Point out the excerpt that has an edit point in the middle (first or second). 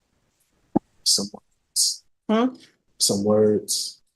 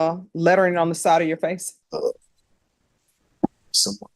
second